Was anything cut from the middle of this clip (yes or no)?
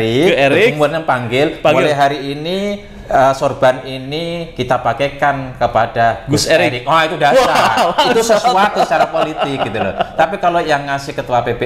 no